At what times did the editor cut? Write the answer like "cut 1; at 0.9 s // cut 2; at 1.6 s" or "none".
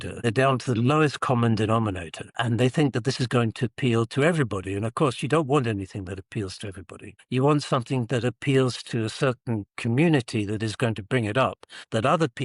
cut 1; at 2.4 s